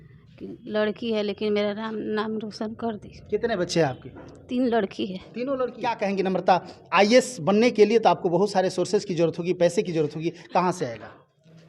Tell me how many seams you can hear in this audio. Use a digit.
1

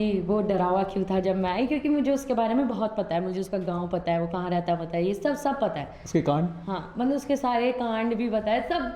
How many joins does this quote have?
0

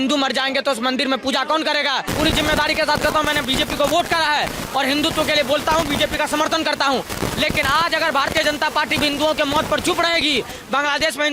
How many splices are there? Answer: 1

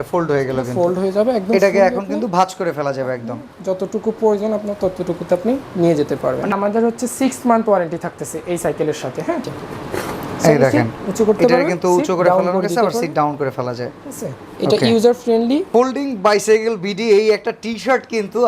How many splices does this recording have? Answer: 3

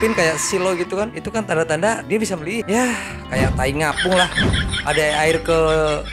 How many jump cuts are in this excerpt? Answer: 1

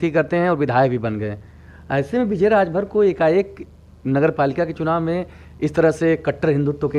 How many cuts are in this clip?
0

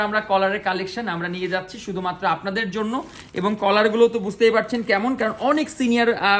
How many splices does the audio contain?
0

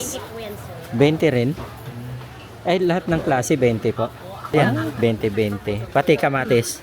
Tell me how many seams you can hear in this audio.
1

